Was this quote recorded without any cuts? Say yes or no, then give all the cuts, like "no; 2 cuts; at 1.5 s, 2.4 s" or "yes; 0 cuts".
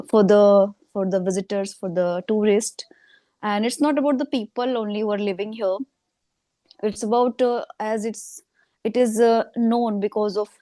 yes; 0 cuts